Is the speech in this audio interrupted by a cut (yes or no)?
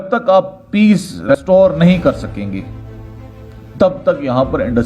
yes